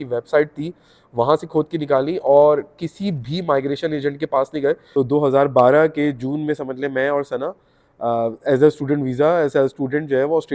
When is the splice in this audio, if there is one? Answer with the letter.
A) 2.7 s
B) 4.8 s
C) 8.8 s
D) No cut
B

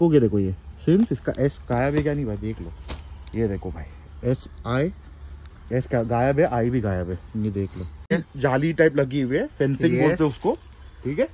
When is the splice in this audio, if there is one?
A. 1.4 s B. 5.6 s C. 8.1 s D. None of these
C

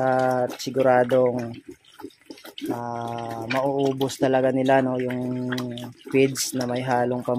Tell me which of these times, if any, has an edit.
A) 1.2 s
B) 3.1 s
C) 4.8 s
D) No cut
D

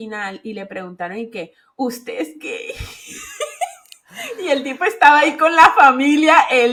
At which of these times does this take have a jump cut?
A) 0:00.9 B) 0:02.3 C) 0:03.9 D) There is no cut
D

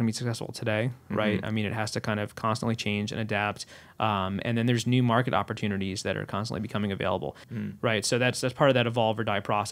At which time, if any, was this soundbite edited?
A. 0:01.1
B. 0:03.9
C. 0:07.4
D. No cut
C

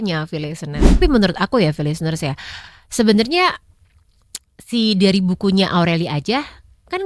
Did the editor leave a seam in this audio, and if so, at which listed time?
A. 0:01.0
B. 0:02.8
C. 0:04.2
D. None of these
A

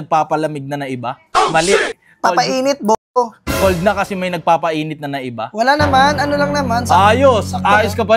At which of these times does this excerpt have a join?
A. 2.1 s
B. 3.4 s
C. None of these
C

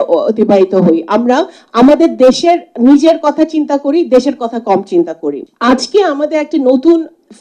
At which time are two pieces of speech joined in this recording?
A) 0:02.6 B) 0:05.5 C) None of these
B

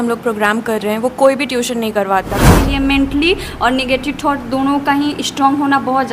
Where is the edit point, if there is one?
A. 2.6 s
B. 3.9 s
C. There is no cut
A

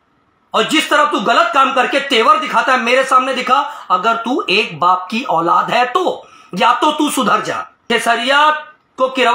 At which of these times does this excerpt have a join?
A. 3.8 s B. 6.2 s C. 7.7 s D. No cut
C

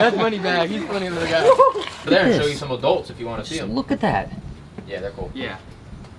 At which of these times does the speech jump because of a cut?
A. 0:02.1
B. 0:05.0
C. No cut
A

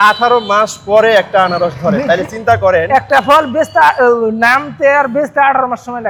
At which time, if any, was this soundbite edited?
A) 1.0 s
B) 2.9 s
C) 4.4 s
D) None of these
D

